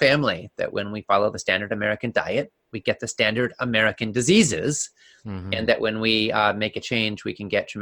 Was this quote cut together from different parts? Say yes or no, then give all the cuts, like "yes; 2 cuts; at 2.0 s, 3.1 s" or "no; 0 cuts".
no; 0 cuts